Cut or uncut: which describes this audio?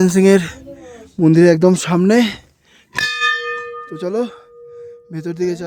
uncut